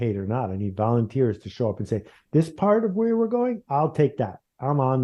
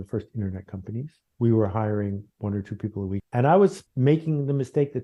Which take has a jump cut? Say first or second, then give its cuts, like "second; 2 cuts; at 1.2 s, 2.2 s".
second; 3 cuts; at 1.2 s, 3.3 s, 3.9 s